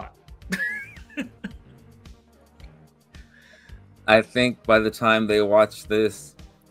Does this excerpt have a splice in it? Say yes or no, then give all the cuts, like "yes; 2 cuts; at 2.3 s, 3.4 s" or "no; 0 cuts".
no; 0 cuts